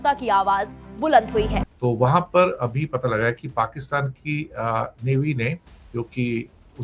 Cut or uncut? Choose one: cut